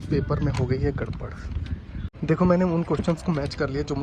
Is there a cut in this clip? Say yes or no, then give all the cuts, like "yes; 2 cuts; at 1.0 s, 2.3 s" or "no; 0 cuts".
yes; 1 cut; at 2.0 s